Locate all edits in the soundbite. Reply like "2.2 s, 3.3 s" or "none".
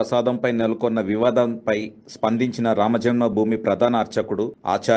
none